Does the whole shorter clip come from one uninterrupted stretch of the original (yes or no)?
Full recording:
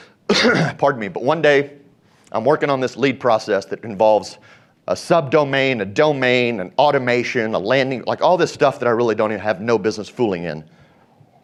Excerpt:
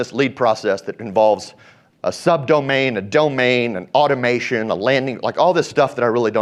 yes